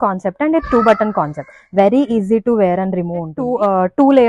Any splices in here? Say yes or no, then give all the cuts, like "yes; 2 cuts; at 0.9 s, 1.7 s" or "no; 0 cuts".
yes; 1 cut; at 3.4 s